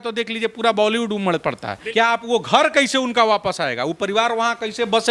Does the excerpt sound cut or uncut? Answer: cut